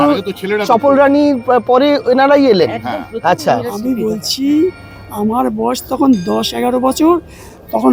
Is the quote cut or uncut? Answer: uncut